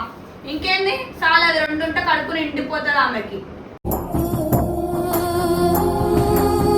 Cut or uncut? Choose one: uncut